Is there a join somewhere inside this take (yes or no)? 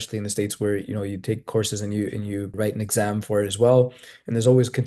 yes